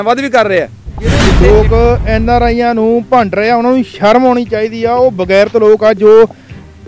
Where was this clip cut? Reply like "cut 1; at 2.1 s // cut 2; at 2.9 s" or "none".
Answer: cut 1; at 1.3 s